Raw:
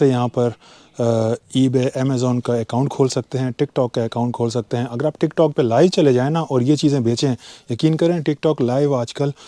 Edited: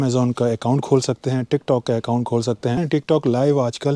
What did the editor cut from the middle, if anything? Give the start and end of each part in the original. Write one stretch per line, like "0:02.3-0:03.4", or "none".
0:04.9-0:08.2